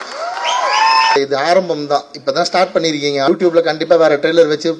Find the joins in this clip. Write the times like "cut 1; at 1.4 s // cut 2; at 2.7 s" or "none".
cut 1; at 1.1 s // cut 2; at 3.3 s